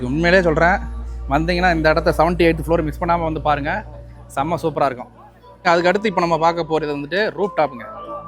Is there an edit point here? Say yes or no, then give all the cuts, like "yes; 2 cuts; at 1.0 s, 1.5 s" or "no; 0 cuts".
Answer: yes; 1 cut; at 5.6 s